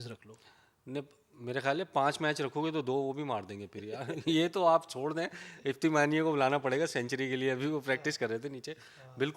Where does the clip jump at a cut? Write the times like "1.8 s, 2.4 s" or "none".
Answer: none